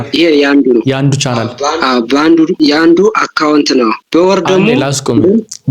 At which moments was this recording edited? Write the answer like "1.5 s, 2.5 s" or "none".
2.5 s, 4.0 s